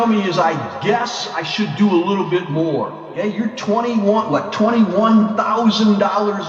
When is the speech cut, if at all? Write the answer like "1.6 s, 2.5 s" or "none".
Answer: 3.0 s